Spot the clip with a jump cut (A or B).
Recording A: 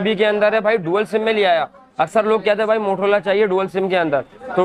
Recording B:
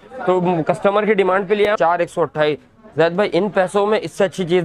B